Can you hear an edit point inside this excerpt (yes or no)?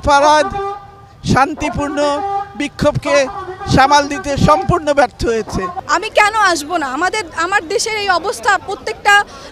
yes